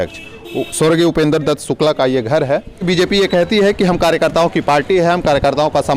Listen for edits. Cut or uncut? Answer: cut